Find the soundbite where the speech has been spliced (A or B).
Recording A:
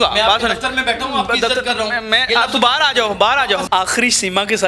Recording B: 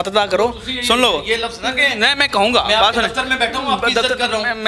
A